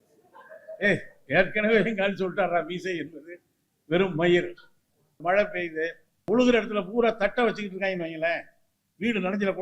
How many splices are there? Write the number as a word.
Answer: two